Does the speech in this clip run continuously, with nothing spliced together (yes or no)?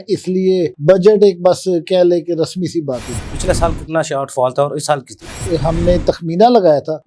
no